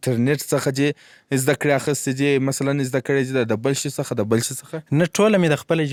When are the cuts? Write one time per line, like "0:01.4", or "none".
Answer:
none